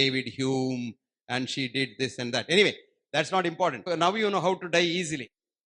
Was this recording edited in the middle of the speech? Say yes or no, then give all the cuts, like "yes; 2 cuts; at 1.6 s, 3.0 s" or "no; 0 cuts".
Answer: yes; 1 cut; at 3.9 s